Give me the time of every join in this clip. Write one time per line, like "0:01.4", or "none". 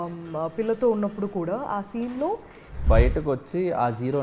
0:02.8